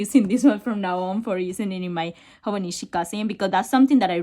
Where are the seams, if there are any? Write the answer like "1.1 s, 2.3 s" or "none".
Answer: none